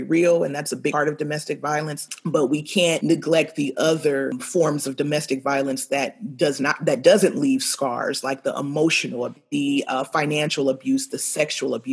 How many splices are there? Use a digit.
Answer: 5